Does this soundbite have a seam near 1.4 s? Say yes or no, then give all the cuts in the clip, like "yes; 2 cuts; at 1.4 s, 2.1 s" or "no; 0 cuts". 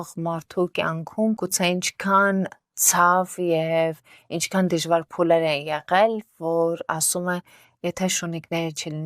yes; 1 cut; at 1.4 s